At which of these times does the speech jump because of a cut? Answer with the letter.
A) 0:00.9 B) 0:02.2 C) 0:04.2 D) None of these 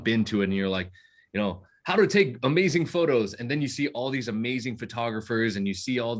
D